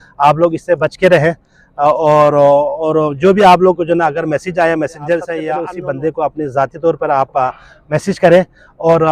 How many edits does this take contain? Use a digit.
1